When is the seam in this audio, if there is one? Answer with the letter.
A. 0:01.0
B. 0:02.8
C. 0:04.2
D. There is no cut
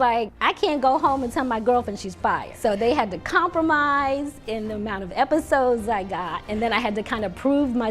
B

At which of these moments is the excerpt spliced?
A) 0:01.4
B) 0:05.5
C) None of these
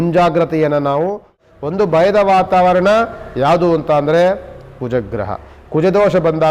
A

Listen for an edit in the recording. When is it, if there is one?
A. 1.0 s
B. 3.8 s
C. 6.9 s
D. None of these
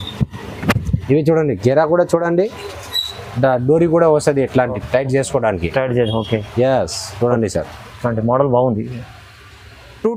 D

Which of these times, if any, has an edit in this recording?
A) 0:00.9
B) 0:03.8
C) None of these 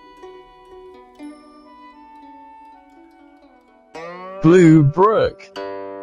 B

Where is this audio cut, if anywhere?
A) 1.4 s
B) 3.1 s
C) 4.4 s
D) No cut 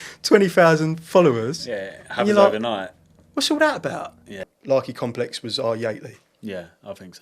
C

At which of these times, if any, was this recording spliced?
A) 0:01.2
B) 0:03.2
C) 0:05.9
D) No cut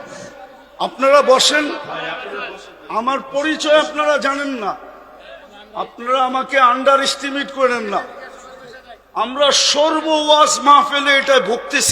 D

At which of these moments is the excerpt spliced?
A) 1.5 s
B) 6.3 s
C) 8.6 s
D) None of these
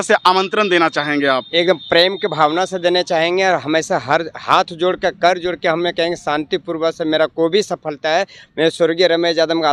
D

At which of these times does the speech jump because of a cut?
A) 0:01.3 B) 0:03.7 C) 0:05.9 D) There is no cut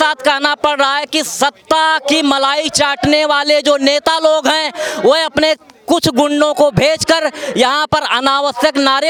D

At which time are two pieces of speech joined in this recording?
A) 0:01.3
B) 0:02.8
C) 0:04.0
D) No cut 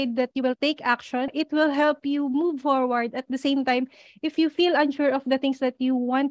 A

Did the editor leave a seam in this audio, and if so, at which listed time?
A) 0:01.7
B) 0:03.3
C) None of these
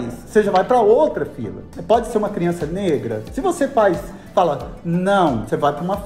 A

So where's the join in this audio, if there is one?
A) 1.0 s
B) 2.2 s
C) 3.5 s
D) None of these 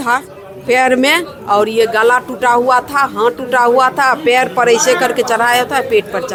D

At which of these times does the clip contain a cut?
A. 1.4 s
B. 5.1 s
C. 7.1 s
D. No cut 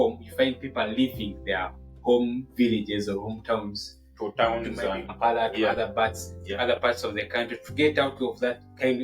B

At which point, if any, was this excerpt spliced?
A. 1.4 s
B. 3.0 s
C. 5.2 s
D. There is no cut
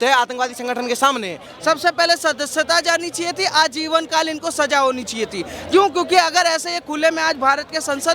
A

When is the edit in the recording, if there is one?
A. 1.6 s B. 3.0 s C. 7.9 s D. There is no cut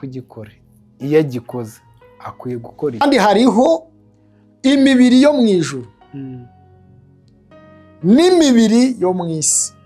B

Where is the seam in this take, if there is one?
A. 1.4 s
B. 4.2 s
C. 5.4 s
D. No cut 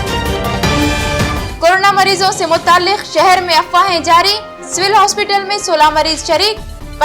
A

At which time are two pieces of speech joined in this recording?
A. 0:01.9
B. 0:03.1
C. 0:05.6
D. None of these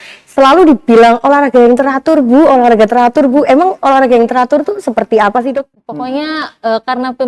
C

